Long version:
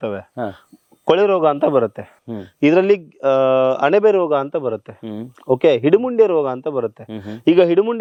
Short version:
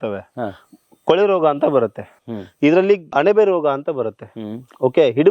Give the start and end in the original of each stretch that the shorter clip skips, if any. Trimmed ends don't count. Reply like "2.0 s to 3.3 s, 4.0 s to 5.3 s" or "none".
3.1 s to 3.8 s